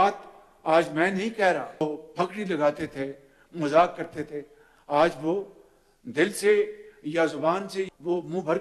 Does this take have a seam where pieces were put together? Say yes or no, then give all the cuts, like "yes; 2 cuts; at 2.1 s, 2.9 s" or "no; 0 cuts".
yes; 1 cut; at 1.8 s